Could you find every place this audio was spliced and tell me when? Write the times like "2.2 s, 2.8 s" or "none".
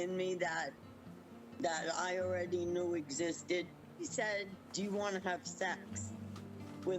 4.1 s